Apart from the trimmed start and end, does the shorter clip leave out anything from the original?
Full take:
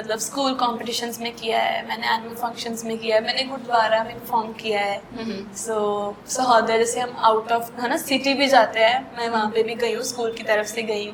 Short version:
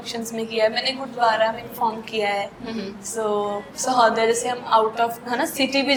no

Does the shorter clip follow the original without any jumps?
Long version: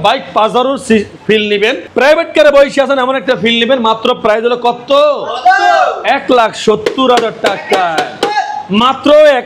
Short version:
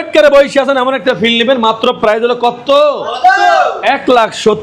yes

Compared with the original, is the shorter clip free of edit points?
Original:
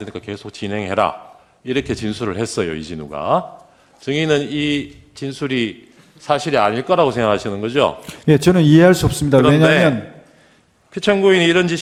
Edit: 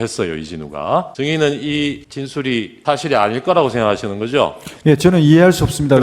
no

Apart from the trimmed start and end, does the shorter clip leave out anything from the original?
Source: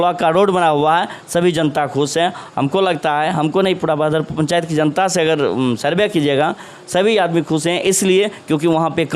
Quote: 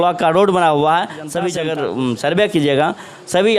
yes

